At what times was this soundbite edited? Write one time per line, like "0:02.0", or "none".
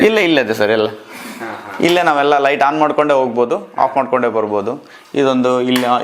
none